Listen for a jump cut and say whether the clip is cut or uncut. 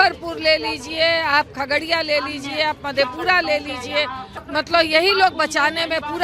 cut